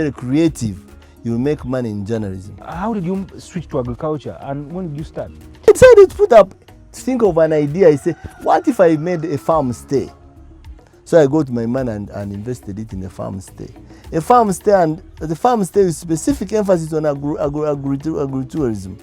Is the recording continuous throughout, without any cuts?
no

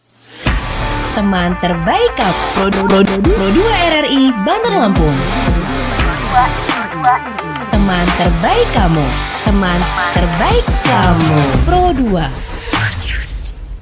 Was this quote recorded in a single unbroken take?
yes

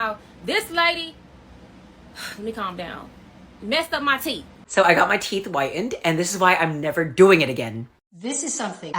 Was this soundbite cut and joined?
yes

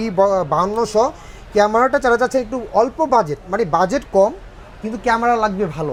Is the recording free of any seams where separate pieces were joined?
yes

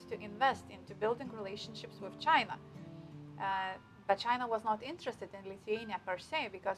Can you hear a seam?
no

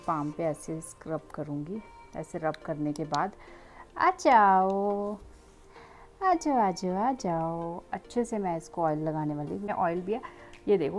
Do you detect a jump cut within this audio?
yes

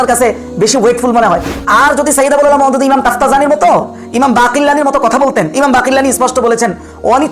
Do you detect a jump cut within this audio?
yes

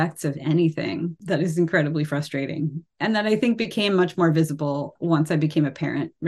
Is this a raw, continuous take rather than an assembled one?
no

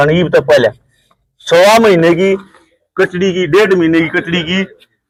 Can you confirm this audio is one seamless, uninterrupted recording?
yes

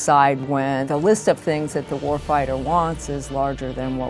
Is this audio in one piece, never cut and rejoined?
yes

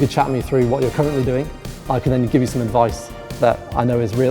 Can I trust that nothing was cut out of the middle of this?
yes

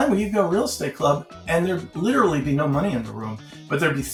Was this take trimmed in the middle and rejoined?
no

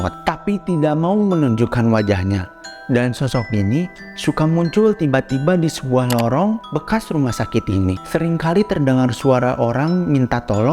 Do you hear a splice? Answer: yes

